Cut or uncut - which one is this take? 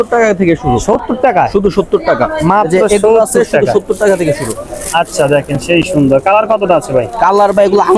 uncut